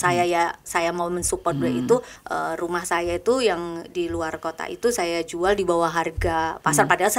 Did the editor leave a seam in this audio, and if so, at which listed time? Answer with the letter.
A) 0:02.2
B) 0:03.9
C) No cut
A